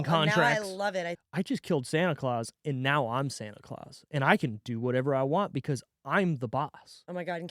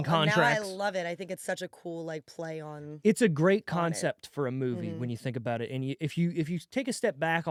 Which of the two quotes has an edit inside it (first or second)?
first